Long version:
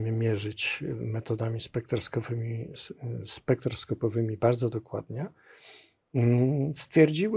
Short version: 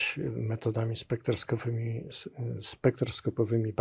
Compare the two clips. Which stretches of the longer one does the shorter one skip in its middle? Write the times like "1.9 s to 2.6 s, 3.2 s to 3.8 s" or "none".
none